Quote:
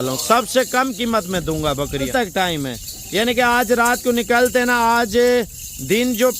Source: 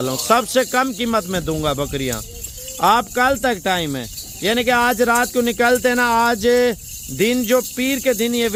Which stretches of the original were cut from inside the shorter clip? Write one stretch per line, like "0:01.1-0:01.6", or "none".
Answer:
0:02.1-0:03.4